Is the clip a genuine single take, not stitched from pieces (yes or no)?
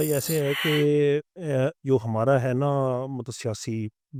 yes